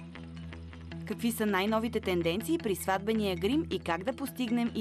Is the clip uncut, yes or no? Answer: no